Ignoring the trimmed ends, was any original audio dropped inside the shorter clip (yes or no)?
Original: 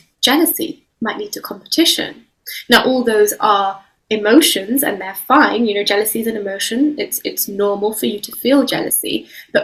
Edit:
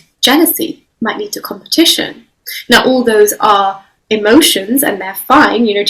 no